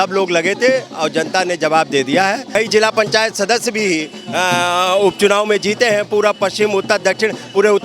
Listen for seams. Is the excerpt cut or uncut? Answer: cut